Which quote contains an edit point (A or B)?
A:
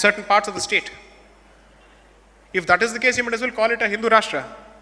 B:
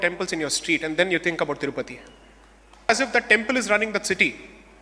B